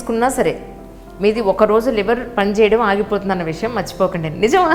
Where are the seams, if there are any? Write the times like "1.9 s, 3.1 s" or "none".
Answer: none